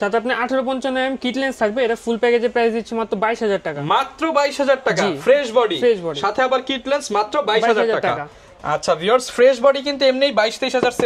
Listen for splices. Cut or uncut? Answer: uncut